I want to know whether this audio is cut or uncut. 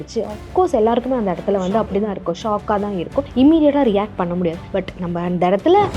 cut